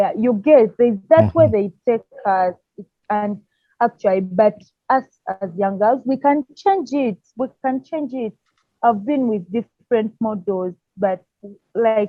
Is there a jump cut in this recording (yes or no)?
no